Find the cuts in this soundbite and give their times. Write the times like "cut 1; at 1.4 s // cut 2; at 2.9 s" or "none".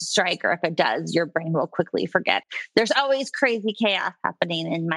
cut 1; at 2.4 s